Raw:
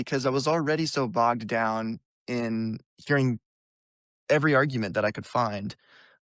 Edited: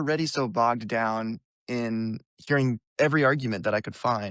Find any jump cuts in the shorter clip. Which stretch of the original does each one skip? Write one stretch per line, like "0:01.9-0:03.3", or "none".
0:03.5-0:04.2